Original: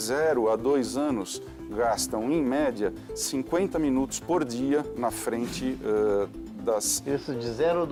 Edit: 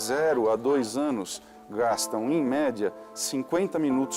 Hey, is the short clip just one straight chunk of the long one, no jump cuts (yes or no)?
yes